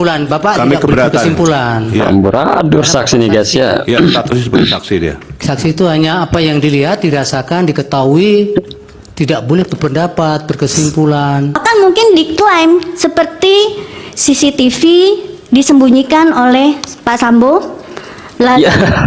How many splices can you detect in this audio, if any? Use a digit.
1